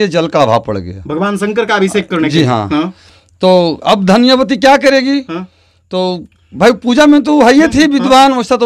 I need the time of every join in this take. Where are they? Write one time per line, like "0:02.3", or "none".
none

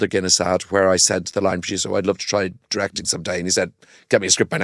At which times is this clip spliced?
none

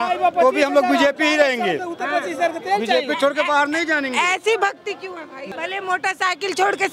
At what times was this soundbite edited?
0:05.4

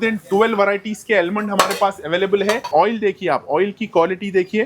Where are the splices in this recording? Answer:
0:02.7

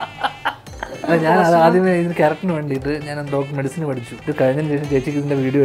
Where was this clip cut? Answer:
0:00.9
0:04.1

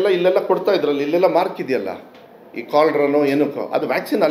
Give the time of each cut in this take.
none

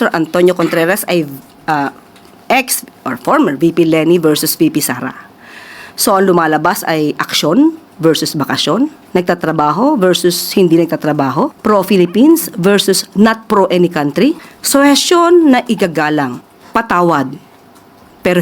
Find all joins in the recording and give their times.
0:09.0
0:11.6
0:14.5
0:16.5

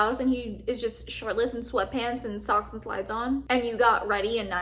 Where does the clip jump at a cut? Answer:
none

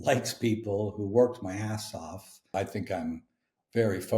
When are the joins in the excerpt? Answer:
0:02.5

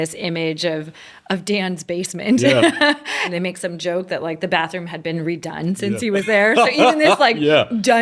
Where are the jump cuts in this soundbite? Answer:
0:03.2

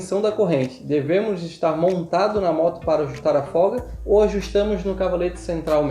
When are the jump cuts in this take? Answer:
none

